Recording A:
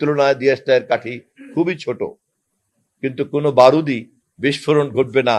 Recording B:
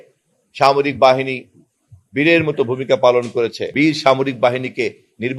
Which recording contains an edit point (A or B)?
B